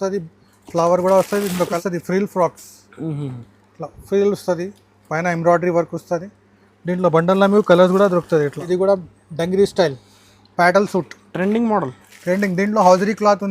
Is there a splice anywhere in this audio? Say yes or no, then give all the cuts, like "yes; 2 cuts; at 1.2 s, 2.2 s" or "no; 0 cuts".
yes; 2 cuts; at 1.7 s, 8.6 s